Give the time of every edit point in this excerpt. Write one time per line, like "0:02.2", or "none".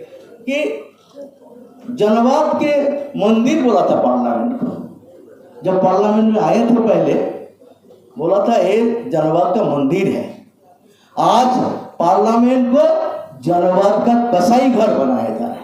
none